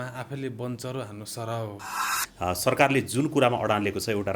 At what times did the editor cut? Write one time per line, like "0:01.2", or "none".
0:02.2